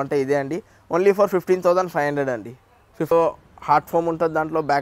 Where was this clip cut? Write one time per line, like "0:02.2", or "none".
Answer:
0:03.1